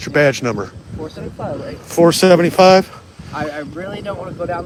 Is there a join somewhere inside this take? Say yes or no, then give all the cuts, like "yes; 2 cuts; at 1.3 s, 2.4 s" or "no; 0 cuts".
no; 0 cuts